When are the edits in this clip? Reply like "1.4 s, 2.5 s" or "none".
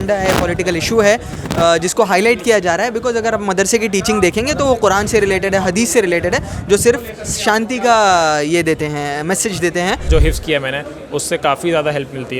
10.1 s